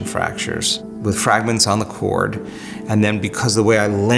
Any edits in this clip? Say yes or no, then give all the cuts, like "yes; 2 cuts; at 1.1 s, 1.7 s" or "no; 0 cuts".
yes; 1 cut; at 0.9 s